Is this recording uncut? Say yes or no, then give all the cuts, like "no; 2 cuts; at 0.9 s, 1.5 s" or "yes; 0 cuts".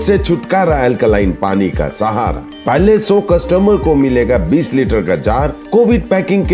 yes; 0 cuts